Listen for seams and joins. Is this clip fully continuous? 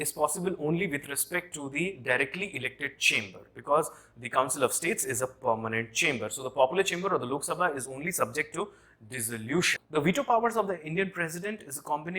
no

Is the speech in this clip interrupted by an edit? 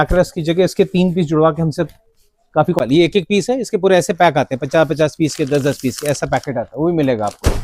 yes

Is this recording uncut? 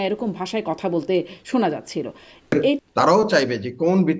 no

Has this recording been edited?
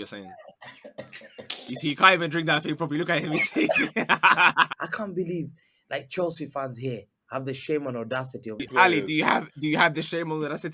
yes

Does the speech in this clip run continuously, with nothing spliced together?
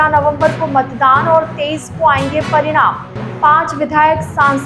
yes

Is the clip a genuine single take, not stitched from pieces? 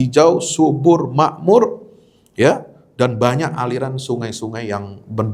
yes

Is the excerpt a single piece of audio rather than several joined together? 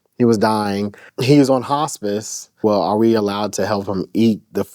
no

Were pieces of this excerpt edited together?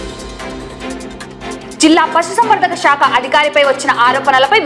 yes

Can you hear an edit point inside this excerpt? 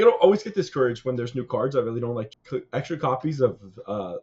yes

